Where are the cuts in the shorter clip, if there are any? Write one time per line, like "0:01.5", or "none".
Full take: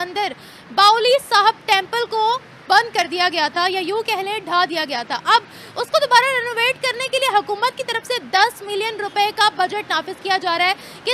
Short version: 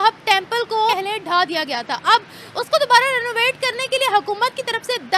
0:00.9